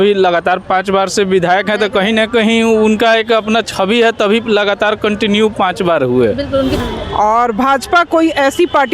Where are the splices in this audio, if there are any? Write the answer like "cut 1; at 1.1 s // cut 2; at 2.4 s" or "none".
cut 1; at 6.8 s